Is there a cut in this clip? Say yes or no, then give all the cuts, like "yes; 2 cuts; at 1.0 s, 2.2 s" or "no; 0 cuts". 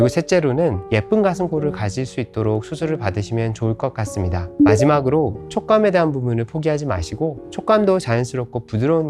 yes; 2 cuts; at 0.8 s, 7.4 s